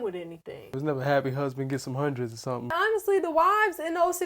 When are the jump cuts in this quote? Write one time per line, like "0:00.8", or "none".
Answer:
0:00.8
0:02.7